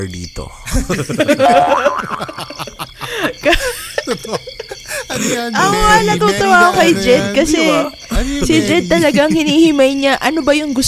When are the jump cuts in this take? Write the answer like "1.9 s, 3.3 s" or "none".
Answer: none